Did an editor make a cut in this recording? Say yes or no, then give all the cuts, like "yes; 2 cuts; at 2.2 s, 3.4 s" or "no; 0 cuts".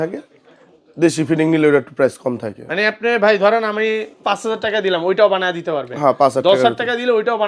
no; 0 cuts